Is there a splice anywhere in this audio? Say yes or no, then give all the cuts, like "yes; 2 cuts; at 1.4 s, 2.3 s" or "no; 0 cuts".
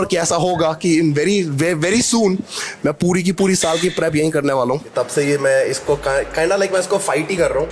yes; 1 cut; at 4.9 s